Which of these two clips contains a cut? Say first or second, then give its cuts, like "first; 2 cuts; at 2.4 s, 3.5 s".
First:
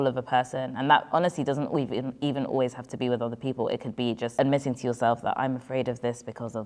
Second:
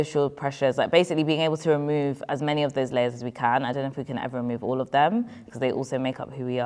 first; 1 cut; at 4.3 s